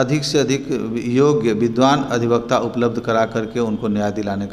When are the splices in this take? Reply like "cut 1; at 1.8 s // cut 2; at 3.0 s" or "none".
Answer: none